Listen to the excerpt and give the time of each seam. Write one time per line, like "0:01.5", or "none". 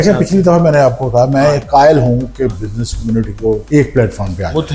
0:03.6